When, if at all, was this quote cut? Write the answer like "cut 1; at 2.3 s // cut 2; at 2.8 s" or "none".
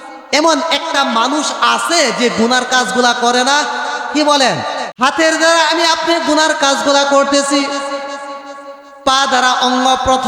cut 1; at 4.8 s